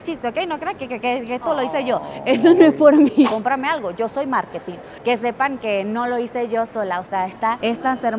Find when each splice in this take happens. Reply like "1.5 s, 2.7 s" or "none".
3.3 s, 5.0 s